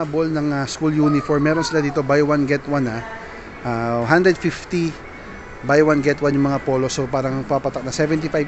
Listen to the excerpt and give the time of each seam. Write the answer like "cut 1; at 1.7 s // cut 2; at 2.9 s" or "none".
none

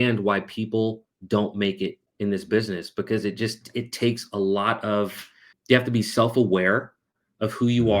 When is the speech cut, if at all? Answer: cut 1; at 2.0 s // cut 2; at 5.5 s

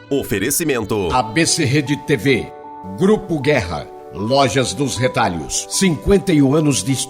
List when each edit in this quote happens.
cut 1; at 1.1 s

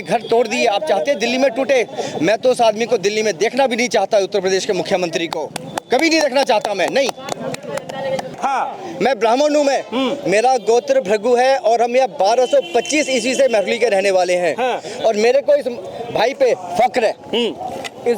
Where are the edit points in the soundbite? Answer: cut 1; at 8.4 s

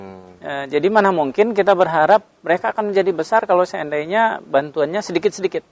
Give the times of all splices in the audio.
none

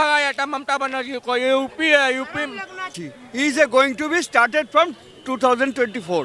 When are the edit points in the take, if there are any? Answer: cut 1; at 3.0 s

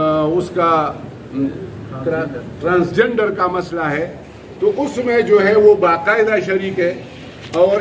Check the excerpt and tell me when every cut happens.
cut 1; at 1.5 s

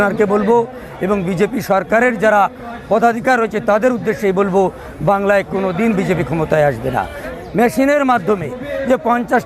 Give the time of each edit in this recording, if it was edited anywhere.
cut 1; at 7.2 s

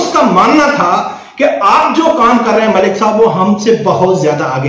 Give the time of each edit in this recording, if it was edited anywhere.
none

